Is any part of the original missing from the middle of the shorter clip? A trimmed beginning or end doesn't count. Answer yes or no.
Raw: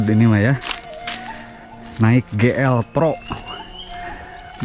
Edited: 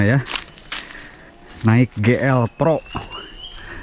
no